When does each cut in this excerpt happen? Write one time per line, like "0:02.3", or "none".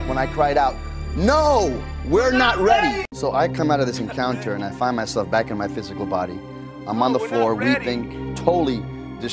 0:03.0